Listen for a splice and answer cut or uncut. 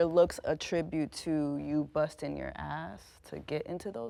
uncut